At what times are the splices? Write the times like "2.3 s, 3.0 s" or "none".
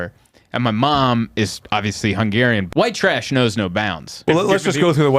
2.7 s, 4.2 s

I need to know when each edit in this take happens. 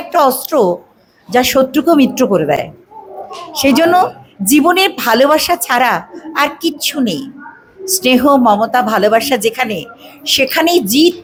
none

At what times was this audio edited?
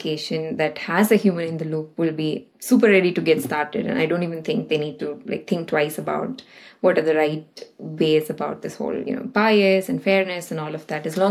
2.5 s

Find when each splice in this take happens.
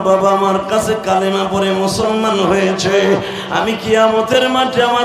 none

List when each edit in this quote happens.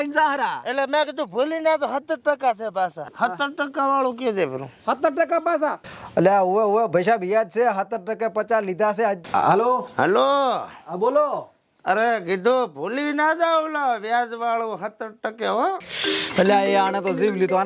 3.0 s, 9.2 s, 15.9 s

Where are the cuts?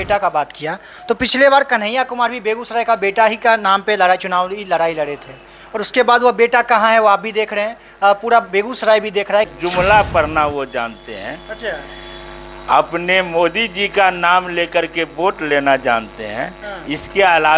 9.5 s

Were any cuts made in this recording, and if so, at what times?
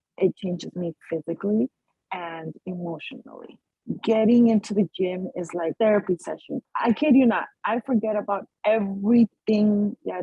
6.6 s

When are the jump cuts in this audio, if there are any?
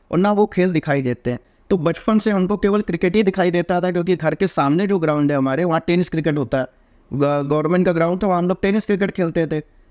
none

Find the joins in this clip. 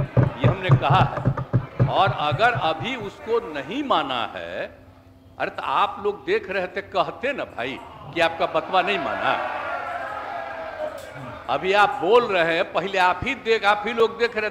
none

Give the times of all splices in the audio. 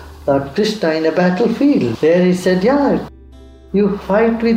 1.9 s, 3.1 s

